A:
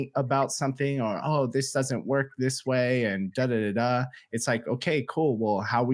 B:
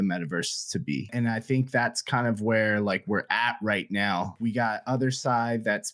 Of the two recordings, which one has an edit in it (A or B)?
B